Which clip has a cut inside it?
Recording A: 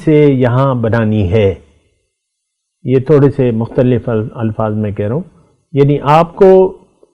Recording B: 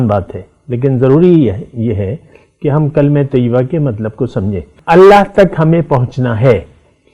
B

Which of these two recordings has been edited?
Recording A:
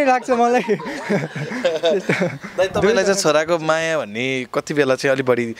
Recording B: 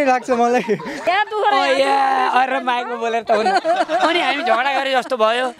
B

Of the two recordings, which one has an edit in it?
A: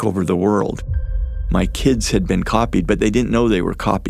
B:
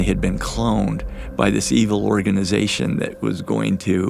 A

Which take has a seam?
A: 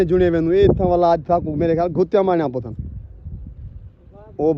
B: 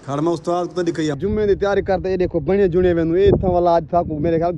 B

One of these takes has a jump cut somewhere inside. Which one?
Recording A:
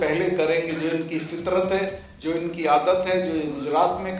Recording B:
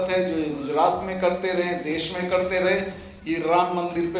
A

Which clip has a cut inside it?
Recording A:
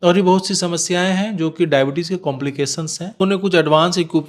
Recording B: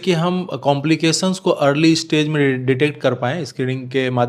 A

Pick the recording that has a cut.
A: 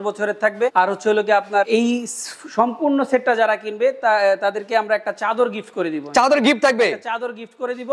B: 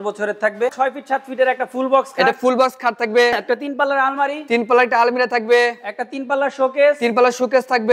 B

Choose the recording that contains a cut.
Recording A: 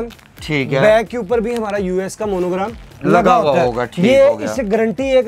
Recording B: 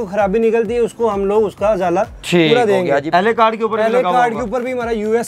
B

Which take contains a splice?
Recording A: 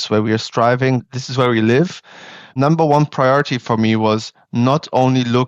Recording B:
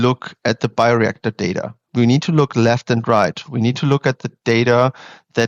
A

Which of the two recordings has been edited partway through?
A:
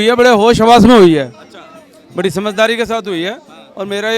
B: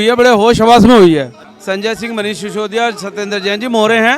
B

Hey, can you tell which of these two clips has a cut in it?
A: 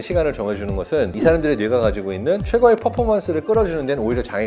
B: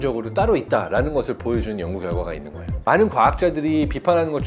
B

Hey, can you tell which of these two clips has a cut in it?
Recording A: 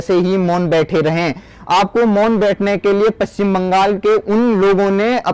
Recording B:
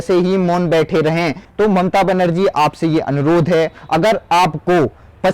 B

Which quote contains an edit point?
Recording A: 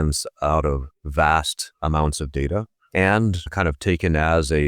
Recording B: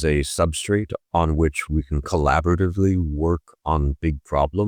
A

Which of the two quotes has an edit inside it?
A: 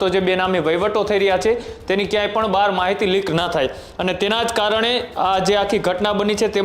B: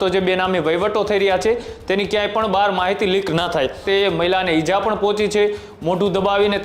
B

